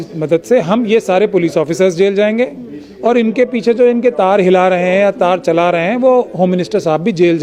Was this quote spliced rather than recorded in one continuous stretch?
no; 0 cuts

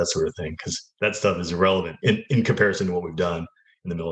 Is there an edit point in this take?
yes; 1 cut; at 1.9 s

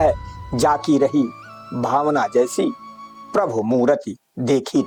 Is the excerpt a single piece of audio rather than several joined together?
yes; 0 cuts

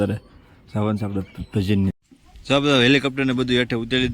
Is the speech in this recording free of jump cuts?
no; 1 cut; at 1.9 s

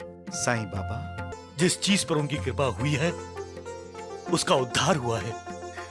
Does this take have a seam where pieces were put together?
yes; 1 cut; at 1.3 s

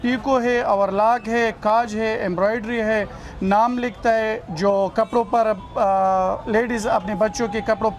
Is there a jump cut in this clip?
no; 0 cuts

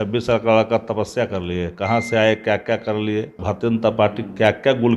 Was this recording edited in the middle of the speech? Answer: yes; 1 cut; at 3.4 s

